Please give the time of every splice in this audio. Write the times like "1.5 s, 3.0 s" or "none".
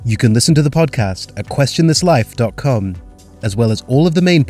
none